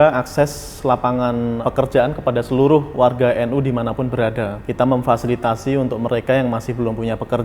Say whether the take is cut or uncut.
cut